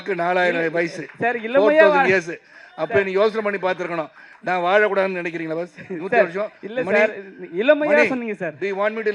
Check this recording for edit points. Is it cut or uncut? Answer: uncut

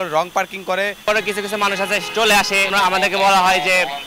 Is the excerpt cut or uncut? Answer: cut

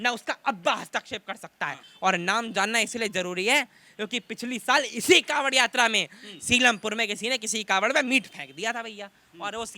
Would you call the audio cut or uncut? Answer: cut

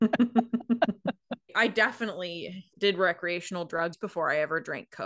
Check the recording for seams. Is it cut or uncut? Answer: cut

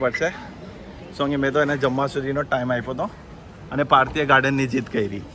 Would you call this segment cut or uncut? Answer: uncut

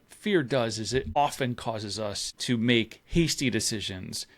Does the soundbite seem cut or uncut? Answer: cut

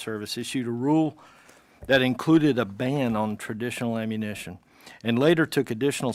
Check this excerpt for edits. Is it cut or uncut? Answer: uncut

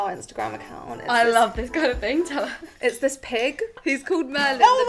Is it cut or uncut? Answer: cut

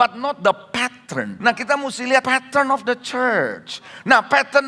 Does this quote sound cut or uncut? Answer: cut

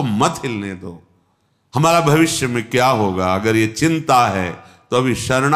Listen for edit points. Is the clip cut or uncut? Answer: uncut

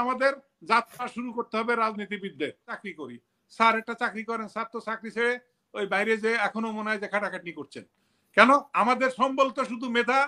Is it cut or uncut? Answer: cut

